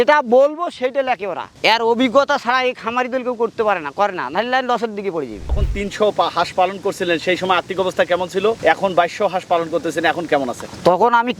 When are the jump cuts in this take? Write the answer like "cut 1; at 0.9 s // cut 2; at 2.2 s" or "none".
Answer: cut 1; at 5.6 s